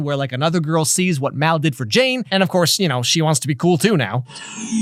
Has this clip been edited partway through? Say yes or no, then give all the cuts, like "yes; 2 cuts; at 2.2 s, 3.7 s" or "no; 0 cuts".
no; 0 cuts